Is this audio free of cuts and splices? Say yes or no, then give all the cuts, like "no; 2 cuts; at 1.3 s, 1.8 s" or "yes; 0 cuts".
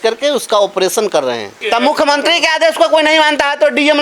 no; 1 cut; at 1.6 s